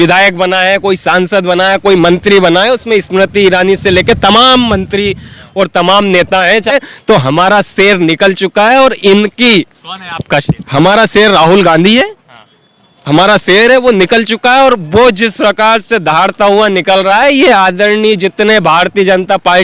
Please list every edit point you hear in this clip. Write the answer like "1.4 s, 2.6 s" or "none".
6.7 s